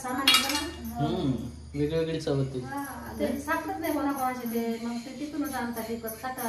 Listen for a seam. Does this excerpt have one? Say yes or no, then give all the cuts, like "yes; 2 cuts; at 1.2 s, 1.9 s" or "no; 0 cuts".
no; 0 cuts